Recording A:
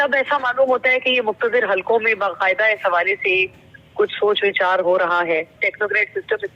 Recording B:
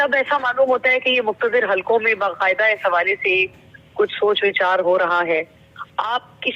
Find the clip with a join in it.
A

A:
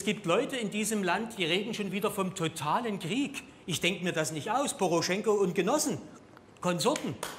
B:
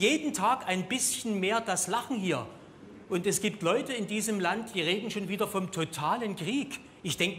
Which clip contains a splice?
B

